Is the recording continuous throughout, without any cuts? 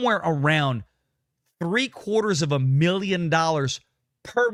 yes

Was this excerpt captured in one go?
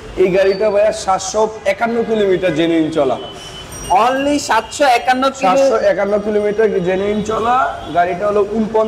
yes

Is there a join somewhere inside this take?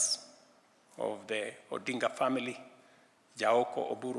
no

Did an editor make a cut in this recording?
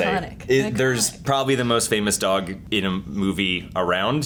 no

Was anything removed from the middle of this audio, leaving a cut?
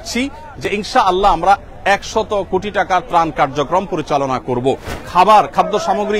yes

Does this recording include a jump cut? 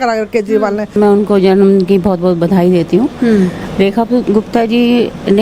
yes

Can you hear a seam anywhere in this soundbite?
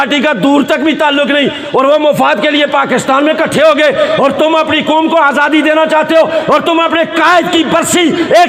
no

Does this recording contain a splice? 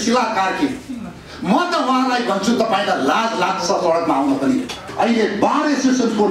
yes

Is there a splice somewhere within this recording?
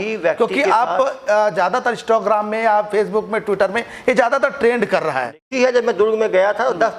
yes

